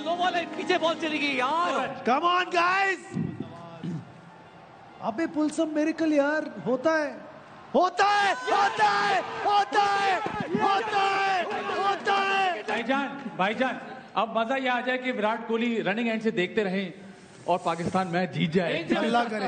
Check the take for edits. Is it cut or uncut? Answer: cut